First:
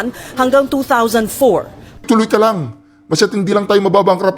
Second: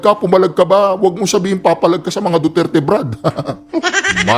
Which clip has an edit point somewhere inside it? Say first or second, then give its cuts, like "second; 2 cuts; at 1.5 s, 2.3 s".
first; 1 cut; at 2.0 s